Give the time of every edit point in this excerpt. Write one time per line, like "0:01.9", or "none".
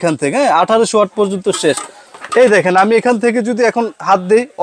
none